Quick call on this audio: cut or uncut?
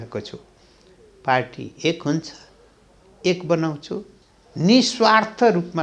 uncut